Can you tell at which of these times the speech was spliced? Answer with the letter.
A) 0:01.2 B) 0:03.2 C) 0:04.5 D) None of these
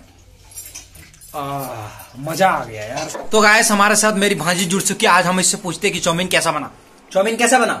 B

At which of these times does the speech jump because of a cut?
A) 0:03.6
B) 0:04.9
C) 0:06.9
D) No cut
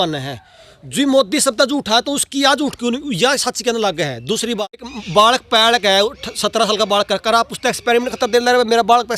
B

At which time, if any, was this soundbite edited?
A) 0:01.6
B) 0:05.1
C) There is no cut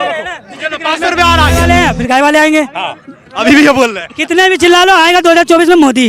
A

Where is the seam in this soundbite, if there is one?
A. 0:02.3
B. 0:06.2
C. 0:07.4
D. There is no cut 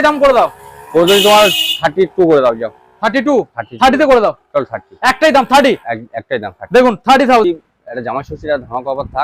C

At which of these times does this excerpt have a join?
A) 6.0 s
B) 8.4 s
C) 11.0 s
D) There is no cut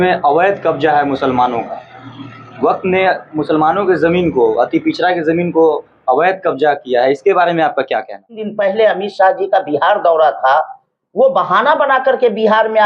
B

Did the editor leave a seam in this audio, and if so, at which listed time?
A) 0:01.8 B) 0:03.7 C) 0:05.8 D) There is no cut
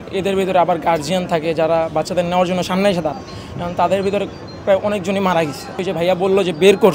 C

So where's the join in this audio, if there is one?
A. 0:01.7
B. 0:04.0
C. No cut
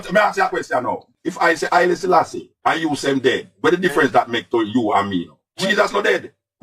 C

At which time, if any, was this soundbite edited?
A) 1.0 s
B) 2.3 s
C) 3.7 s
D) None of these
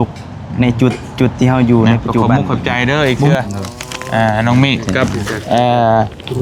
B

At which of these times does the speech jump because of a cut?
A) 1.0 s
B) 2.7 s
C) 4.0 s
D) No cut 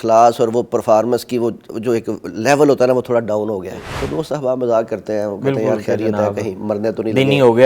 C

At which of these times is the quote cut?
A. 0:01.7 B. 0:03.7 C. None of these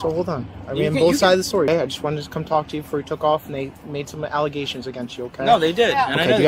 A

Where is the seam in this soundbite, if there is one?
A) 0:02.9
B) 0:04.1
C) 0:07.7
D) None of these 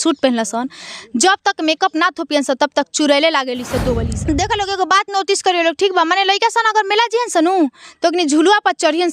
B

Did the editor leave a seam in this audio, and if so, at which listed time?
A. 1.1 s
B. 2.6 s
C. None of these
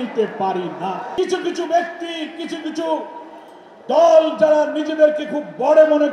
A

